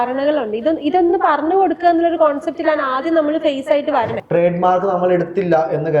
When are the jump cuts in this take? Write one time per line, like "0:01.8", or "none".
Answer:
0:04.2